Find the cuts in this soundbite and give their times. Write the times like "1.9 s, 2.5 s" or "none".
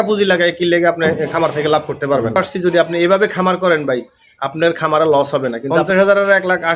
2.4 s, 5.7 s